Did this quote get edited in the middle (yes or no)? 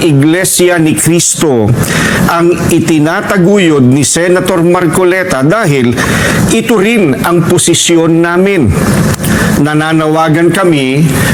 no